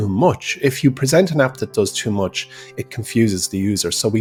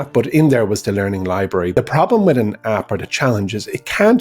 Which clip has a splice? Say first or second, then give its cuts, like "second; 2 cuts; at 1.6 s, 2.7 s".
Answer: second; 1 cut; at 1.7 s